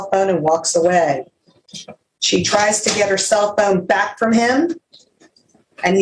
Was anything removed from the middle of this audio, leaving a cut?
no; 0 cuts

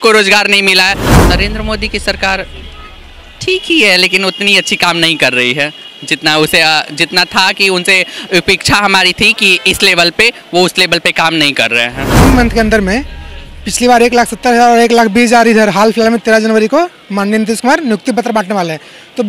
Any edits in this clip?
yes; 2 cuts; at 1.1 s, 12.1 s

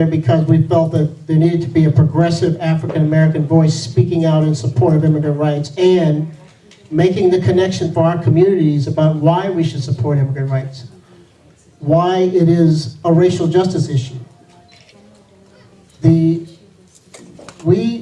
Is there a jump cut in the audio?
yes; 1 cut; at 3.1 s

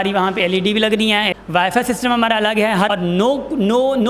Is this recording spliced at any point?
yes; 2 cuts; at 1.3 s, 2.9 s

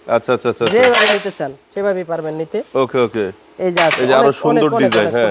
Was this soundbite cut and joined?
no; 0 cuts

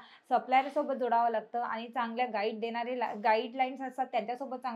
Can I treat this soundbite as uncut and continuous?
yes; 0 cuts

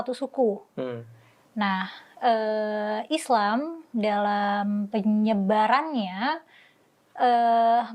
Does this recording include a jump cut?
no; 0 cuts

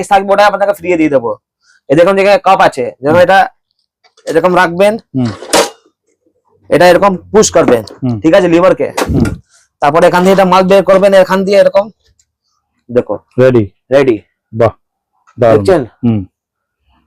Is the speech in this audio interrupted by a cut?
no; 0 cuts

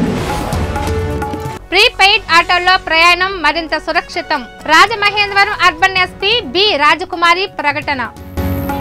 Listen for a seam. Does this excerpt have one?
no; 0 cuts

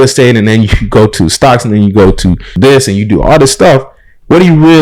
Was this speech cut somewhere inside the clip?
yes; 1 cut; at 2.5 s

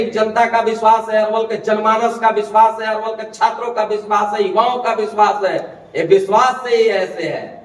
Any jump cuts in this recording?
no; 0 cuts

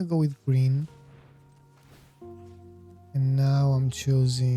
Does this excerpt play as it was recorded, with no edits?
no; 2 cuts; at 0.9 s, 2.9 s

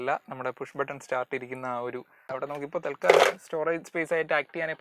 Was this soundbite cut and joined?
yes; 1 cut; at 2.3 s

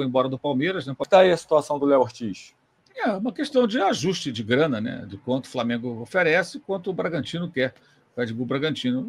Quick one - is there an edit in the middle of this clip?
yes; 1 cut; at 1.1 s

